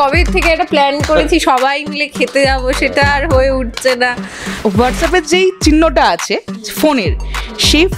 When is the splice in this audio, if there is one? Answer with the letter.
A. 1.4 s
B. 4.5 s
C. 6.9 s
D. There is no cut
B